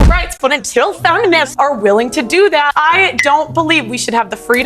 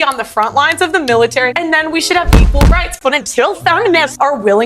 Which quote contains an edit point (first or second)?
second